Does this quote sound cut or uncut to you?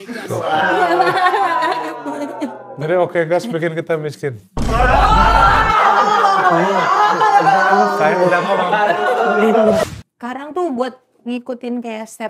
cut